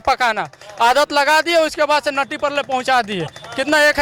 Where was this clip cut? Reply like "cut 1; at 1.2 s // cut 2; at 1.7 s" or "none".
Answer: none